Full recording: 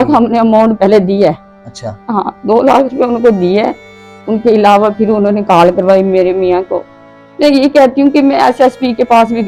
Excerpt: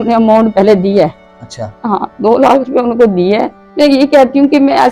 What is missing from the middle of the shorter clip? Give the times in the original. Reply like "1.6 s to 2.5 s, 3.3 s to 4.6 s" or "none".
3.8 s to 7.2 s